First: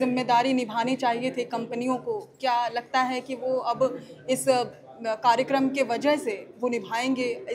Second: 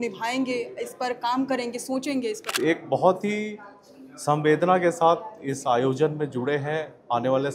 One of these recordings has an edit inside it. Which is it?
second; 1 cut; at 2.4 s

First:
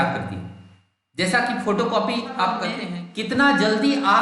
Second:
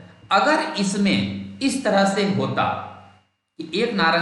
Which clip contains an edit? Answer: first; 1 cut; at 2.7 s

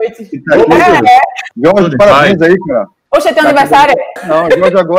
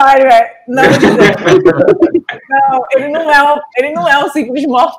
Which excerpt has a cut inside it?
first; 3 cuts; at 1.4 s, 3.0 s, 4.2 s

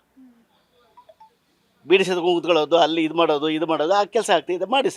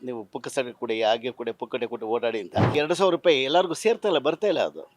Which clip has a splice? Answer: second; 1 cut; at 2.7 s

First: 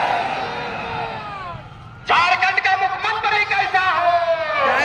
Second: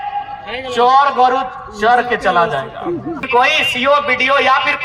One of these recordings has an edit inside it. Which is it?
second; 1 cut; at 3.2 s

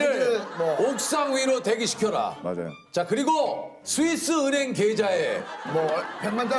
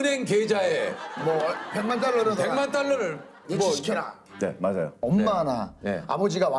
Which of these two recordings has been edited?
second; 1 cut; at 5.0 s

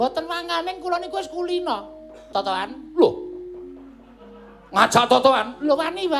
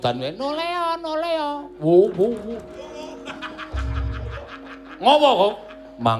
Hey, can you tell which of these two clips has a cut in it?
first; 1 cut; at 2.2 s

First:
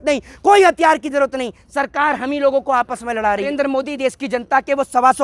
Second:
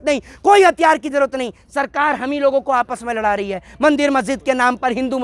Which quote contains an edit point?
first; 1 cut; at 3.8 s

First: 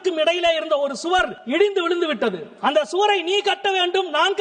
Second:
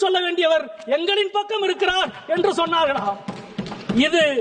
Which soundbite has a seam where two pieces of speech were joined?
first; 2 cuts; at 1.4 s, 2.5 s

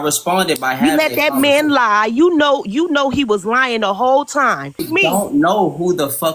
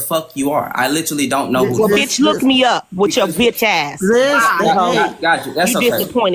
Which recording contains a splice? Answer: first; 1 cut; at 4.8 s

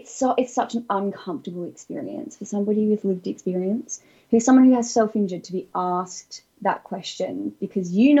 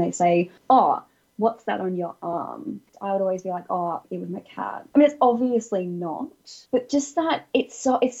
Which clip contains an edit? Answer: second; 3 cuts; at 2.9 s, 4.8 s, 6.5 s

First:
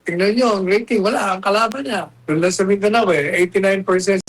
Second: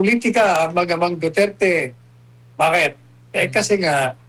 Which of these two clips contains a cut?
first; 1 cut; at 2.1 s

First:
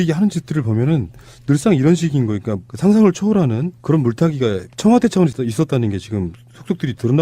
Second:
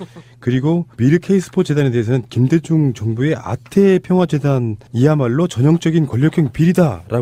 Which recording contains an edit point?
first; 1 cut; at 4.7 s

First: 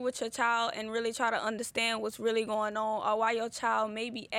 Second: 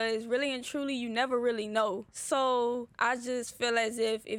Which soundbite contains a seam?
second; 2 cuts; at 2.1 s, 2.9 s

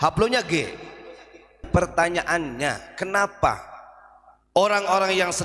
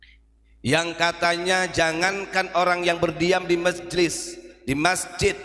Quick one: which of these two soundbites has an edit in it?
first; 1 cut; at 1.7 s

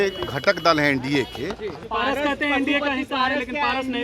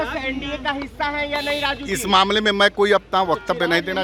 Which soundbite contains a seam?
first; 1 cut; at 1.8 s

